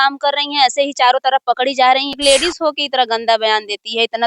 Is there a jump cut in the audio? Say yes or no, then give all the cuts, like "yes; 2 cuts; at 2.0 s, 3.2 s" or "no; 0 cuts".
yes; 1 cut; at 2.2 s